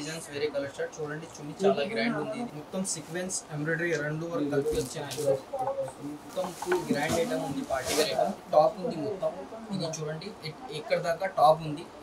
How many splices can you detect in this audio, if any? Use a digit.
3